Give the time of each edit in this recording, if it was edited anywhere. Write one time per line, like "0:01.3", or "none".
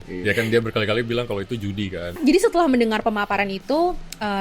0:02.2